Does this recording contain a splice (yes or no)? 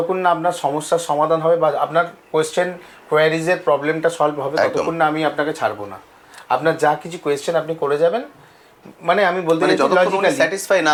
no